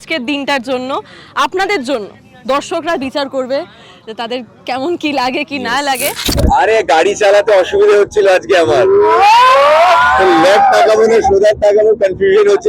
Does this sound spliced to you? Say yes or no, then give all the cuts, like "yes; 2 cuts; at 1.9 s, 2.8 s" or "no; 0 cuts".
yes; 1 cut; at 6.3 s